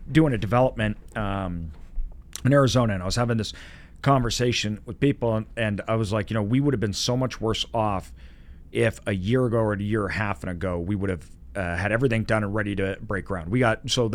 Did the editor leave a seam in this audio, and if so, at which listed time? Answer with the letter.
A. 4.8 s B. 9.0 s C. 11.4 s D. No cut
D